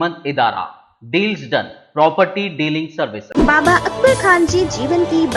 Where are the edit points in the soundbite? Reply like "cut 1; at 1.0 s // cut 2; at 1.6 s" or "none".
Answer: cut 1; at 3.2 s